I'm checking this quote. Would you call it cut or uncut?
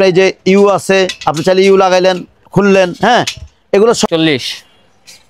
cut